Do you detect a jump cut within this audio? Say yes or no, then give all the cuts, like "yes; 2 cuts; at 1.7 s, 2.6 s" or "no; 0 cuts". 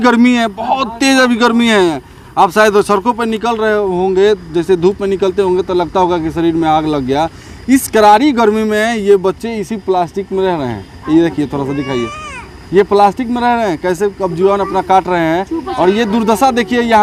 no; 0 cuts